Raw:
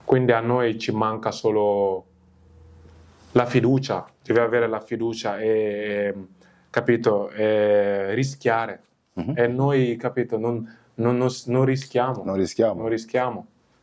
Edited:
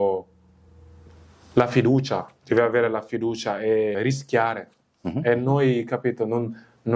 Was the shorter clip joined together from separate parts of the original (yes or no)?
yes